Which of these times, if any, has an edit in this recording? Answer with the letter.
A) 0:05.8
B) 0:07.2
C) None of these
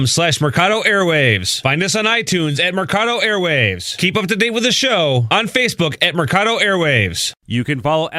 B